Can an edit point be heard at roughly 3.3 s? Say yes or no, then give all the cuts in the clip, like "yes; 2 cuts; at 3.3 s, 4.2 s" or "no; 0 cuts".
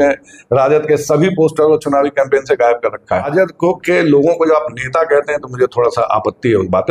yes; 1 cut; at 3.3 s